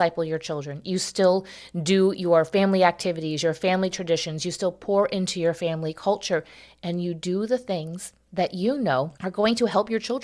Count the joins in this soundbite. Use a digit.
1